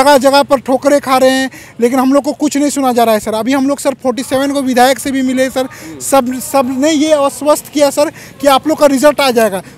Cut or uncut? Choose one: uncut